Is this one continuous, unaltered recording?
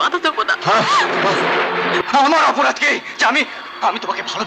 no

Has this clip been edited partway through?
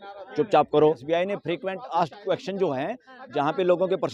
yes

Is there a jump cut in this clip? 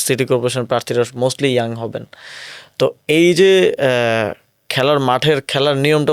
no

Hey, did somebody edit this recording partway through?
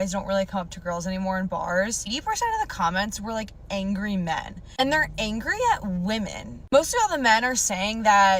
no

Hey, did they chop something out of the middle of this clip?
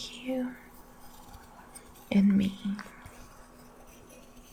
no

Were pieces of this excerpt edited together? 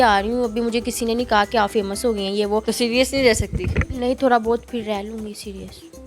yes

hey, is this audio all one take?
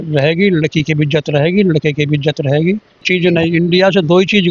no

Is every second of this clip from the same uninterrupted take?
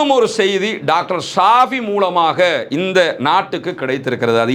yes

